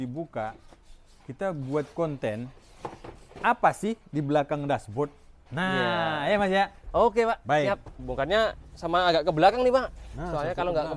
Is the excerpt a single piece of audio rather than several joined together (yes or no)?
no